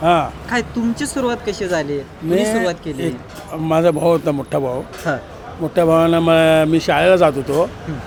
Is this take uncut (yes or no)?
yes